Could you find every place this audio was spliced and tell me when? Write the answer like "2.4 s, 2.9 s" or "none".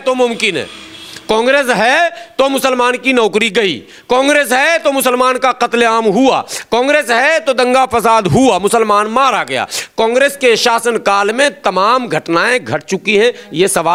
none